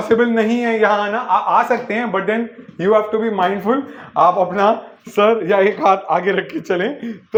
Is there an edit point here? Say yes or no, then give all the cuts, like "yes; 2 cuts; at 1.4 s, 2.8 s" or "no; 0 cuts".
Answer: no; 0 cuts